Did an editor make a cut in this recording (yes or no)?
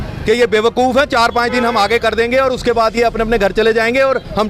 no